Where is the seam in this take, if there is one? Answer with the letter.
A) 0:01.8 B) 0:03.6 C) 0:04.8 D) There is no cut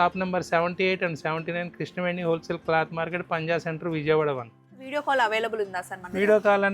C